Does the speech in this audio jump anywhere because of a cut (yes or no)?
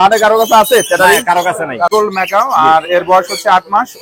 yes